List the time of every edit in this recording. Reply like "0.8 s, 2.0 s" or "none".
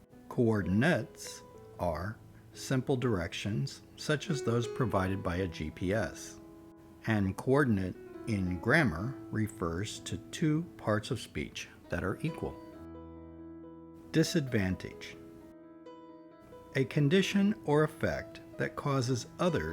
14.9 s, 16.3 s